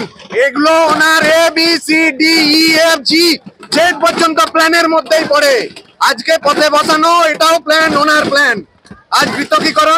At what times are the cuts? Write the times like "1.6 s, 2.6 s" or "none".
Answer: none